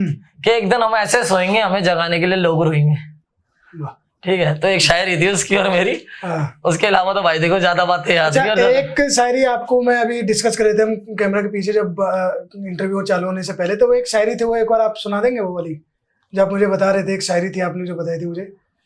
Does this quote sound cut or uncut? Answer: uncut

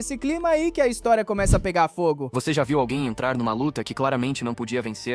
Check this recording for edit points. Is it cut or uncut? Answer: cut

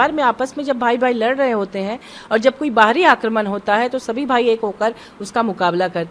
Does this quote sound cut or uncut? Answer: uncut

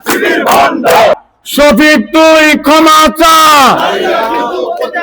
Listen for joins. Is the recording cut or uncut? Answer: cut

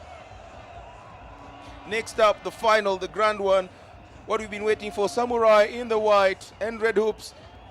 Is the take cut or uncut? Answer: cut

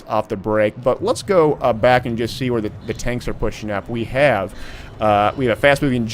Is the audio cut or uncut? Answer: uncut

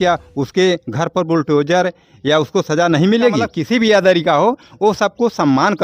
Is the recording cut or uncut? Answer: cut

